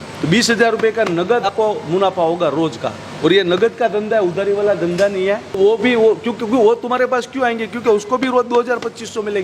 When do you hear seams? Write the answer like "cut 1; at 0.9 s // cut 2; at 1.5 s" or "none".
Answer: cut 1; at 1.5 s // cut 2; at 5.6 s

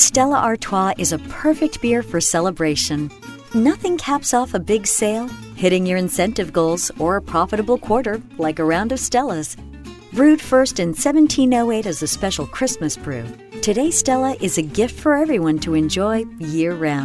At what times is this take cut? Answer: none

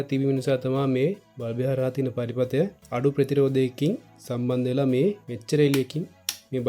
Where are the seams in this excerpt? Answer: none

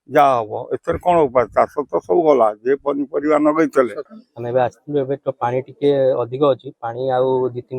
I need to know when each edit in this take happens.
cut 1; at 4.1 s

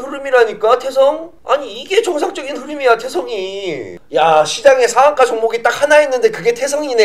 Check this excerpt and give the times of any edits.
cut 1; at 3.9 s

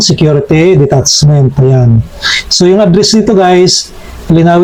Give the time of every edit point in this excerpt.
none

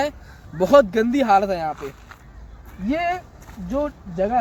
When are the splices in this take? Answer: none

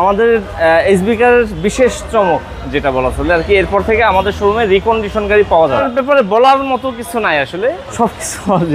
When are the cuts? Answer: cut 1; at 5.9 s // cut 2; at 7.9 s

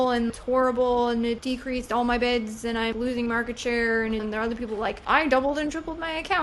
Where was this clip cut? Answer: cut 1; at 1.4 s // cut 2; at 2.9 s // cut 3; at 4.2 s

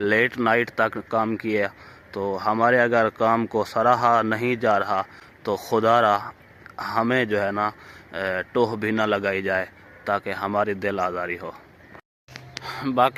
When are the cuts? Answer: none

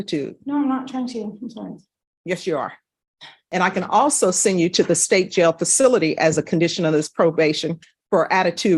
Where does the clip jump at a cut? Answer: cut 1; at 3.4 s

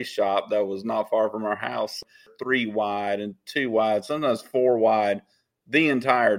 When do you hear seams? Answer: cut 1; at 2.0 s

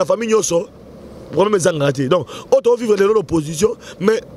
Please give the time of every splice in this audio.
none

